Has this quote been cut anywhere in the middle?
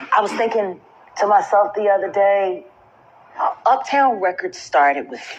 no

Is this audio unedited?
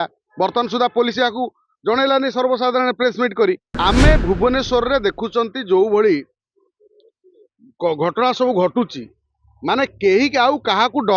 no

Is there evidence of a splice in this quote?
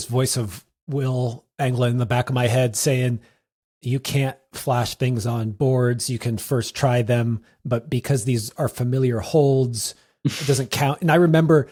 no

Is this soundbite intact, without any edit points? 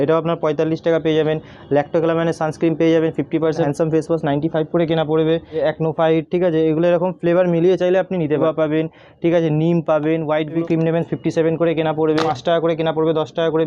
no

